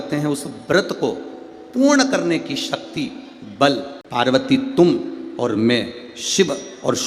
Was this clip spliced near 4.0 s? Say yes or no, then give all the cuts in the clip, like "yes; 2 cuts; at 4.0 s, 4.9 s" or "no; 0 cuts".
yes; 1 cut; at 4.0 s